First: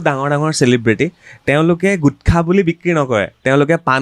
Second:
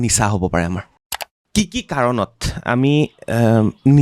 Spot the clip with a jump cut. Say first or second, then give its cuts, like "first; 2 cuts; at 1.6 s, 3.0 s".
second; 1 cut; at 1.4 s